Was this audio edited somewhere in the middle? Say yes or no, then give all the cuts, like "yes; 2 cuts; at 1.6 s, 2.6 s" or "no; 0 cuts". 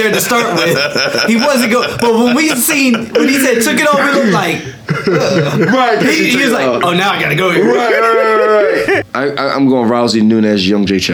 yes; 1 cut; at 9.0 s